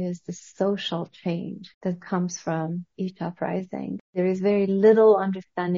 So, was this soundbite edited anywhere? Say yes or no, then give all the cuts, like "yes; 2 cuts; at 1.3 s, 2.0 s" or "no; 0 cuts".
yes; 2 cuts; at 1.6 s, 4.1 s